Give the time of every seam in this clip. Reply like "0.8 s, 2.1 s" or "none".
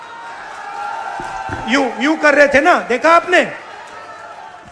none